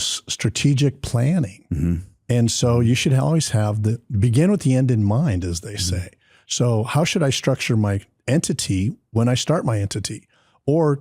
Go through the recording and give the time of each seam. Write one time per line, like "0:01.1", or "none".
0:08.1